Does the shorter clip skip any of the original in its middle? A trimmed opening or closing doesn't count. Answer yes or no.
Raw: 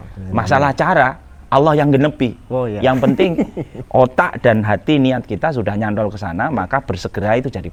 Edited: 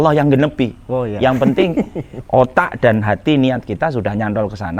no